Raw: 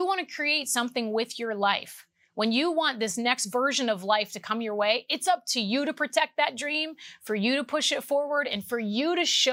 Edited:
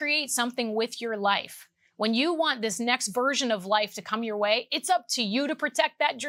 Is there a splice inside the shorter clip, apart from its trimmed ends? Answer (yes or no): no